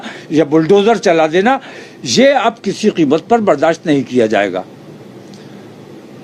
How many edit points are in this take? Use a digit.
0